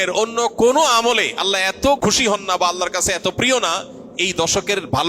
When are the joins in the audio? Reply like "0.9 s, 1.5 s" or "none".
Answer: 2.0 s